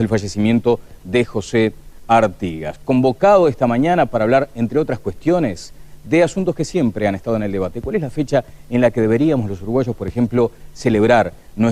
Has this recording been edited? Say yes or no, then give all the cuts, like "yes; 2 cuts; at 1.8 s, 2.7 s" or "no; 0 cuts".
yes; 1 cut; at 4.6 s